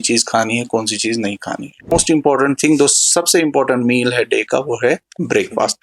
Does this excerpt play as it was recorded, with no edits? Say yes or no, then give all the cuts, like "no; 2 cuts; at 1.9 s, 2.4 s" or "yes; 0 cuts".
no; 1 cut; at 1.9 s